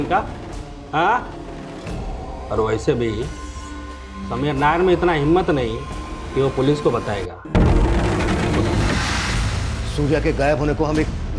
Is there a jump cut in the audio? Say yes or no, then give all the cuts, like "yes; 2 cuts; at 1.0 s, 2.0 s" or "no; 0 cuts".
yes; 1 cut; at 9.0 s